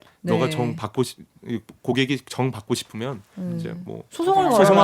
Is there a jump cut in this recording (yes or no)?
no